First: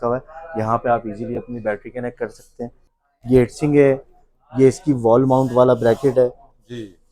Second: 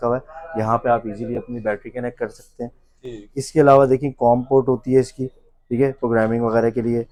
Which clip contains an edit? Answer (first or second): first